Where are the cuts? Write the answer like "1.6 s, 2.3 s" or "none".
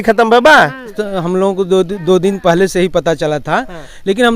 1.0 s